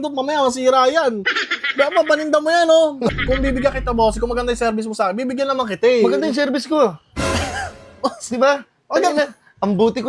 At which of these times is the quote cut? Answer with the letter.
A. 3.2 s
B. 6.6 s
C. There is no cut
A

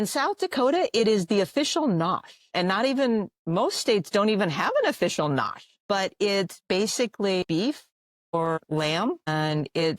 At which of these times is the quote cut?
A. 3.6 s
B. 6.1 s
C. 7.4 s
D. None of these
C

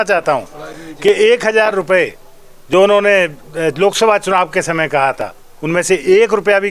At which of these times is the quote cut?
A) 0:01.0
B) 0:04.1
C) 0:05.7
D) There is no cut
D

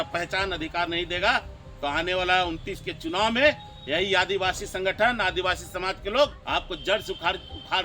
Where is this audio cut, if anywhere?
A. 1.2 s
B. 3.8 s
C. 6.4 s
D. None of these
C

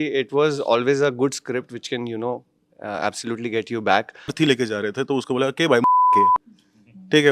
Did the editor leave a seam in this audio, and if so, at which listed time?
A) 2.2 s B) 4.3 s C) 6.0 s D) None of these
B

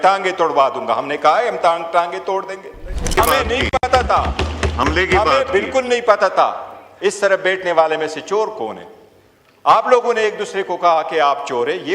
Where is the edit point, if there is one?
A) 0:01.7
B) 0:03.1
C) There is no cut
B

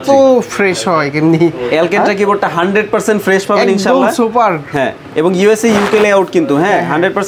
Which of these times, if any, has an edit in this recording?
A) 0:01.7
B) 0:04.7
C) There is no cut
C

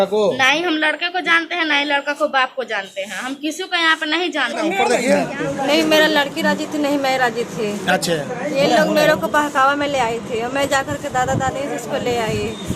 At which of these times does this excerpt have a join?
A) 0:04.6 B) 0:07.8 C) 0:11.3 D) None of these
A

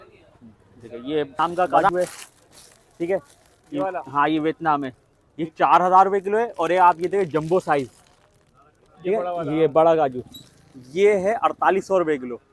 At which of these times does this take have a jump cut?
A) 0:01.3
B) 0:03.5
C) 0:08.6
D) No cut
A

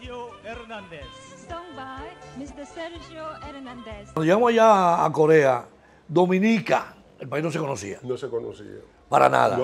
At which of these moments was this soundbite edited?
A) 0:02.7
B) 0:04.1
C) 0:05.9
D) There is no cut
B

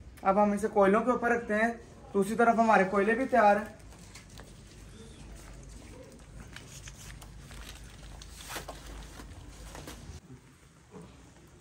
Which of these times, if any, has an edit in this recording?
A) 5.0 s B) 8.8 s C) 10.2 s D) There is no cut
C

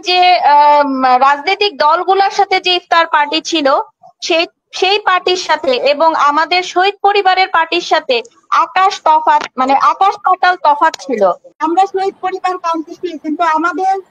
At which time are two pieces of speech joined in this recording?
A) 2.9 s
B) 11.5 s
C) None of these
B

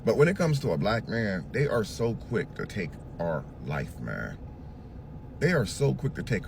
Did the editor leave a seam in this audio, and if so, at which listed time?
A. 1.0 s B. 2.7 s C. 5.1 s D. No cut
D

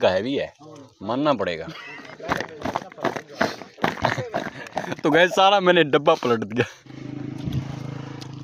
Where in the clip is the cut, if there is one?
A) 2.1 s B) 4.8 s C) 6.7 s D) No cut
A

